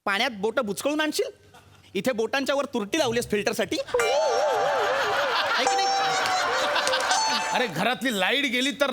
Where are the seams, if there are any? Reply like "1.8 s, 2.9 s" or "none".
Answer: 7.5 s